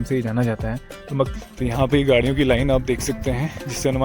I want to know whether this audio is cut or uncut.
cut